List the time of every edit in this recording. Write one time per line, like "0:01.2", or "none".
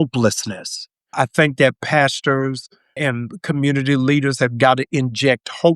0:01.1
0:03.0